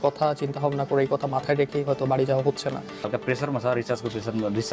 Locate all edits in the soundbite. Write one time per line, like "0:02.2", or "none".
0:03.1

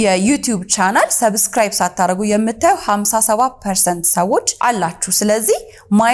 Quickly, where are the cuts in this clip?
none

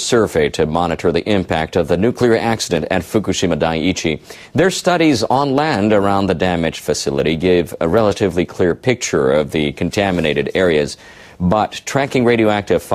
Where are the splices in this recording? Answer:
none

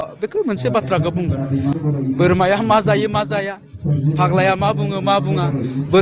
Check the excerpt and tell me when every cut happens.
0:01.7

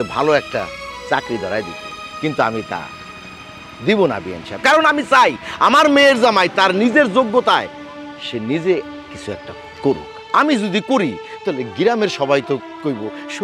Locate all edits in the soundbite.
none

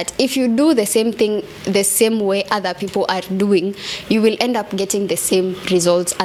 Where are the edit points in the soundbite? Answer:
none

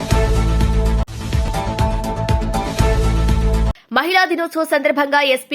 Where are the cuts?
0:01.1
0:03.7

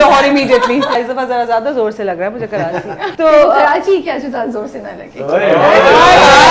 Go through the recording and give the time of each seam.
0:01.0
0:03.0

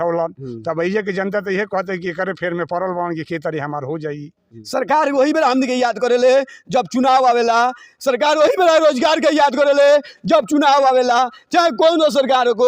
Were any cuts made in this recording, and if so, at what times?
0:04.6

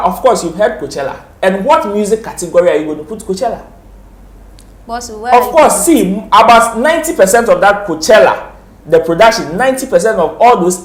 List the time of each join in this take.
none

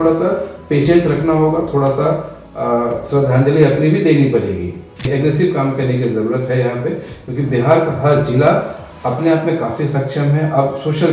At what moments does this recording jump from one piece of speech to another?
0:05.1

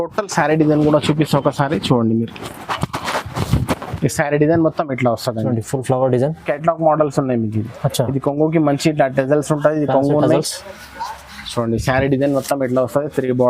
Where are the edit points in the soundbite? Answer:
0:06.5

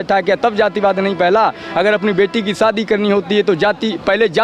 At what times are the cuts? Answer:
none

